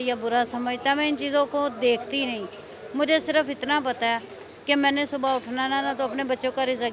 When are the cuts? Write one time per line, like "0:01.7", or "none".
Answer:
none